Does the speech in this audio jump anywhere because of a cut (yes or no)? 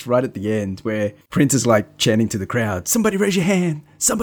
yes